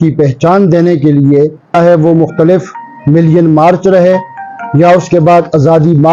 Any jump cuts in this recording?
yes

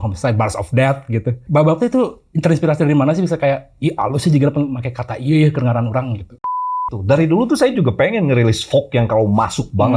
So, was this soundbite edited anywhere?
yes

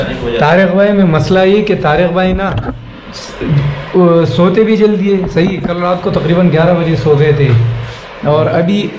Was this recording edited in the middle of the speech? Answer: no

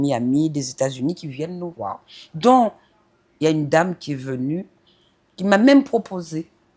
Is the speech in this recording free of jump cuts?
yes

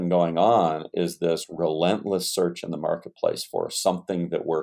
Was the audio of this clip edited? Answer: no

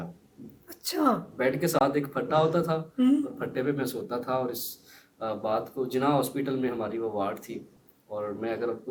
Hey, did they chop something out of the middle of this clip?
no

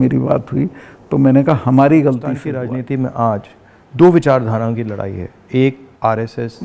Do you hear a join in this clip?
yes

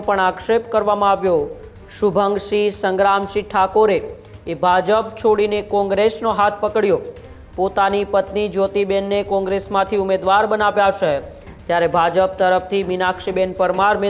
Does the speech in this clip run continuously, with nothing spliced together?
yes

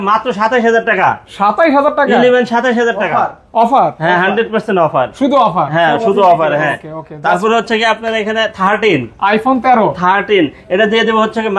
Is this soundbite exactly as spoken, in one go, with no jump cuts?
yes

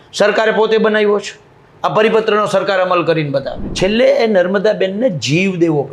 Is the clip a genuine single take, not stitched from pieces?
no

